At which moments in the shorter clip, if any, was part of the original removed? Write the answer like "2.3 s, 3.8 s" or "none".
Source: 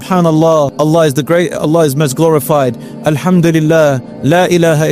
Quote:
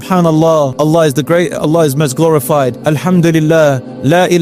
2.8 s